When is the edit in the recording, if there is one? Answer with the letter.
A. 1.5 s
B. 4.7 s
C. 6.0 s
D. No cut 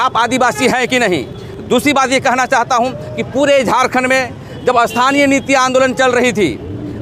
D